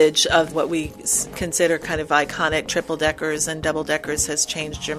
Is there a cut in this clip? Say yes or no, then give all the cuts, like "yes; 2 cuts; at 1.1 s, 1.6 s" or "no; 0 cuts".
no; 0 cuts